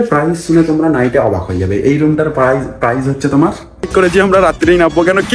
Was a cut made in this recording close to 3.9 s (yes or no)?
yes